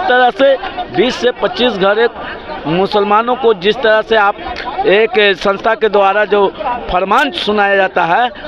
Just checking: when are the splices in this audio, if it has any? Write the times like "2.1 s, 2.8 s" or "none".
none